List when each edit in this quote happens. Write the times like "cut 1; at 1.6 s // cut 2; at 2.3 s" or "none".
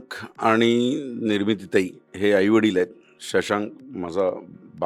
none